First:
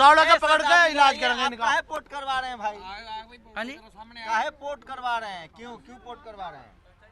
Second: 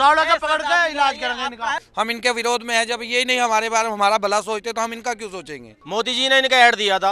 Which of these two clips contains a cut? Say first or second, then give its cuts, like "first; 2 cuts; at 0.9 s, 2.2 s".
second; 2 cuts; at 1.9 s, 5.8 s